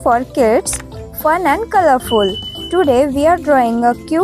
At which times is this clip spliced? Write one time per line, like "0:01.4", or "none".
none